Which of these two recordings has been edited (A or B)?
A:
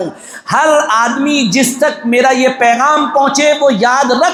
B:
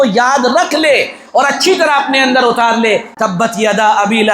B